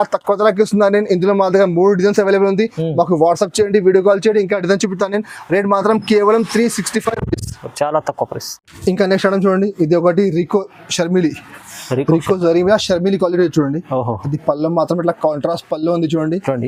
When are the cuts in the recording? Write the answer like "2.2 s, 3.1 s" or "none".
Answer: none

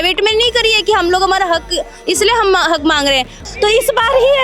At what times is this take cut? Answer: 3.4 s

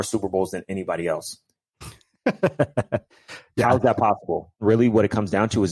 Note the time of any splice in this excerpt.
4.6 s

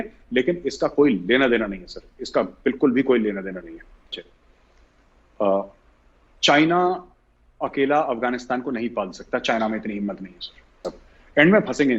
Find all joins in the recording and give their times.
10.9 s

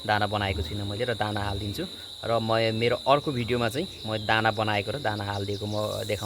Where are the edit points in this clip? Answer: none

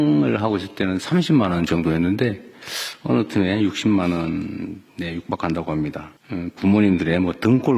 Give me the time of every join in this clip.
6.1 s

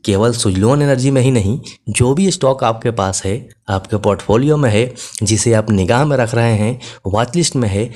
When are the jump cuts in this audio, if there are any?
none

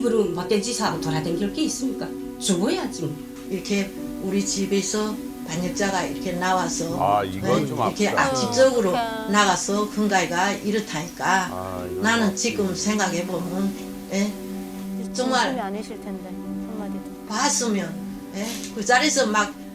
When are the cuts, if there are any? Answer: none

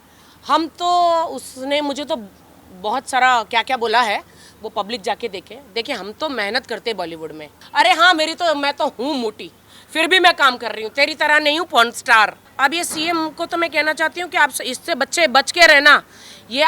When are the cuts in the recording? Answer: 7.6 s, 12.4 s

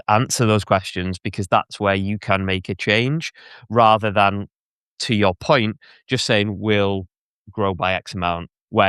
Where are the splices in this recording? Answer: none

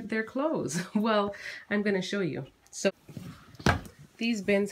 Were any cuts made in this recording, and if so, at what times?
2.9 s

